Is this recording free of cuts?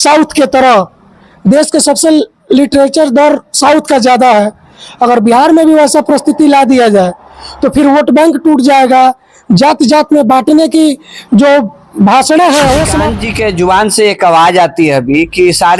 no; 1 cut; at 13.1 s

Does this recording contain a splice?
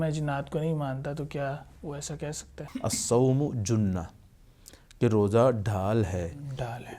yes; 1 cut; at 2.6 s

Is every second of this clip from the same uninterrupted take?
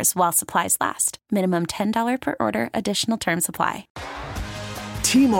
no; 1 cut; at 3.9 s

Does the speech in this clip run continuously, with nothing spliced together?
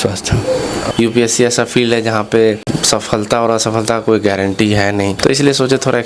no; 3 cuts; at 0.8 s, 2.7 s, 5.2 s

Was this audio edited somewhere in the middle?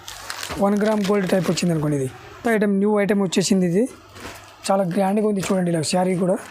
yes; 1 cut; at 2.4 s

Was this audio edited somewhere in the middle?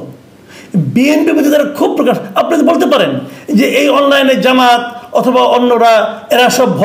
no; 0 cuts

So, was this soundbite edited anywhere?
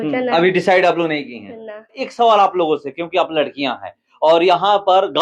yes; 1 cut; at 2.0 s

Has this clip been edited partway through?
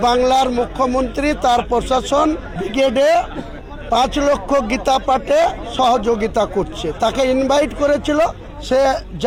no; 0 cuts

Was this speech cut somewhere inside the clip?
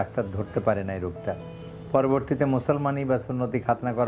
no; 0 cuts

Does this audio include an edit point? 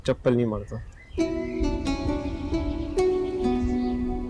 no; 0 cuts

